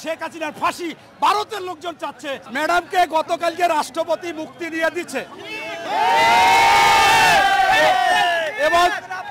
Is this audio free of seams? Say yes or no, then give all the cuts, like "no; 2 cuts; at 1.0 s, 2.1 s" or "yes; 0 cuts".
no; 1 cut; at 2.4 s